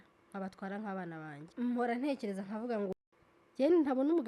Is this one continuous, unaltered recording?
no; 2 cuts; at 1.4 s, 2.9 s

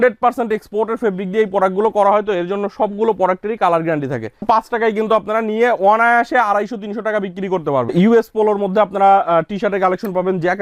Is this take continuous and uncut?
no; 2 cuts; at 4.3 s, 7.9 s

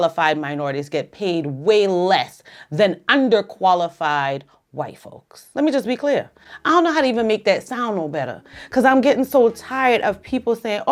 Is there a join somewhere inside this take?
no; 0 cuts

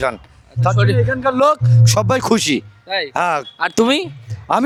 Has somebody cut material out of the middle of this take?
no; 0 cuts

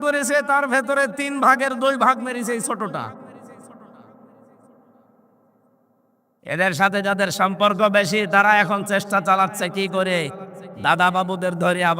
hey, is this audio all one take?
yes; 0 cuts

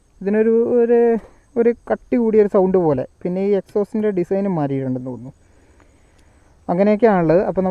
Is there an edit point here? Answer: no; 0 cuts

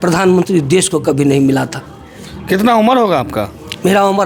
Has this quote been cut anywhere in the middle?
no; 0 cuts

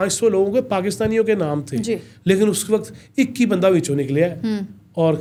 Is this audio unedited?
yes; 0 cuts

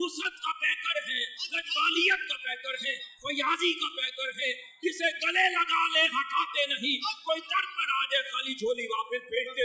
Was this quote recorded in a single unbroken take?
yes; 0 cuts

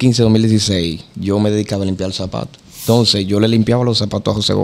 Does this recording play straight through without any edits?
no; 1 cut; at 2.9 s

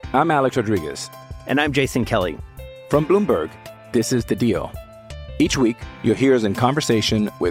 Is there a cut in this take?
no; 0 cuts

